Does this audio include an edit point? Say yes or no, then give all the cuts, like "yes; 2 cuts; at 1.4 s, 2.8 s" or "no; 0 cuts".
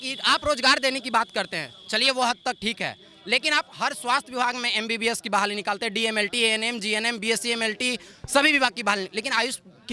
no; 0 cuts